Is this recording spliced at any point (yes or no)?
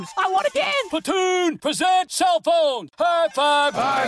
no